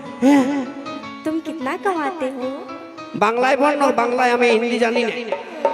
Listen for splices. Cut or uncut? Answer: cut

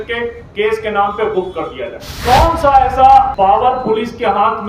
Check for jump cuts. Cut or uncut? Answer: cut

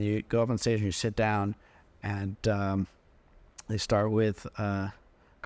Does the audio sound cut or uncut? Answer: uncut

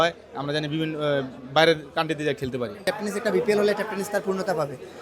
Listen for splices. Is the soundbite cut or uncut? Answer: cut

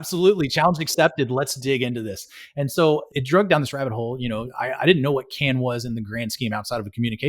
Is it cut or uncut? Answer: cut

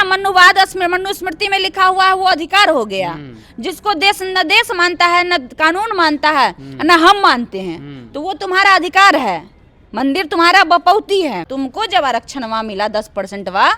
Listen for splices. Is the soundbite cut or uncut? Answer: cut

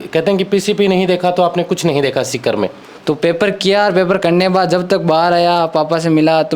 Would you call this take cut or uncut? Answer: cut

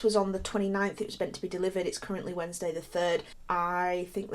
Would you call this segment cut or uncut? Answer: cut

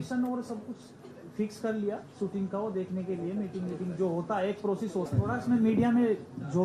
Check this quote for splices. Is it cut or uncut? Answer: cut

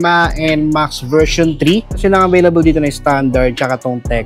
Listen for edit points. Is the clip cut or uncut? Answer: cut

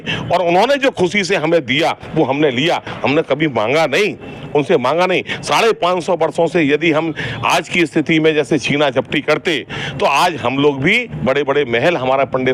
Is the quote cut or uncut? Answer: uncut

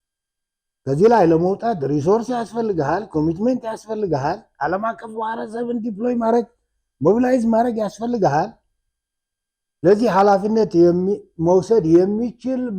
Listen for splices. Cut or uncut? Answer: uncut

